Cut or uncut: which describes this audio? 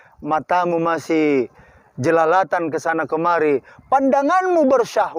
uncut